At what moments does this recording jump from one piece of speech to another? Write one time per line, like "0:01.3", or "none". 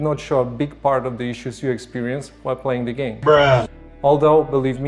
0:03.3